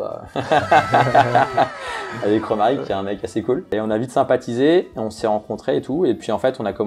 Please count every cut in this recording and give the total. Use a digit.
0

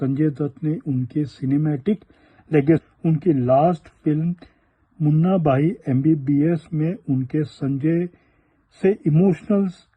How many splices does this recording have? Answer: 1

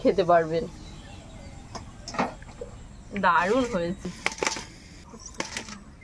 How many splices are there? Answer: 2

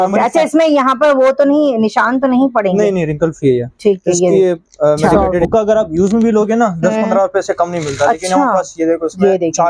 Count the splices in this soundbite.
1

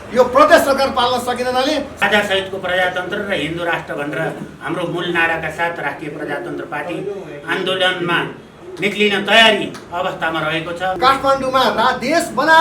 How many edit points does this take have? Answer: 2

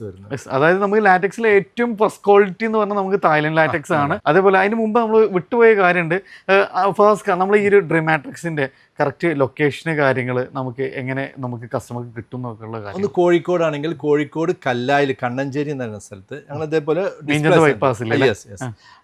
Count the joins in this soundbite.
0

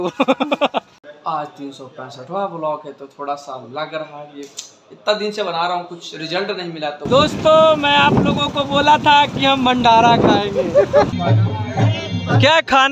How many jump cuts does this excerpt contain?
3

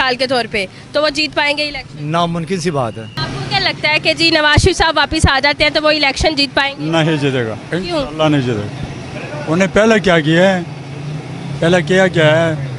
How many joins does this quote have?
1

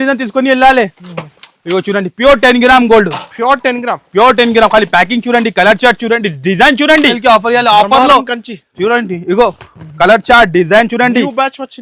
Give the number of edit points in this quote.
1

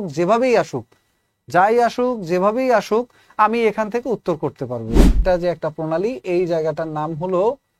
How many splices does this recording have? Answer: 1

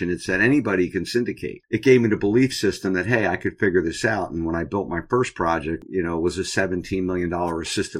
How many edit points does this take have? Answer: 2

